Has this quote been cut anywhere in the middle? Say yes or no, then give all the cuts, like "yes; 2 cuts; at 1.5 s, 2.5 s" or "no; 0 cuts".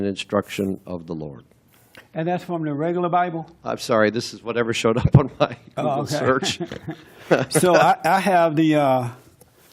no; 0 cuts